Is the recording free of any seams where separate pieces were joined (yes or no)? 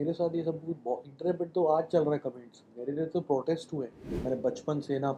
no